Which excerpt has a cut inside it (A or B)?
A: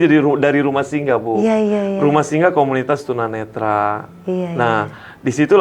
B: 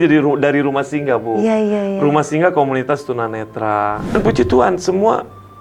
B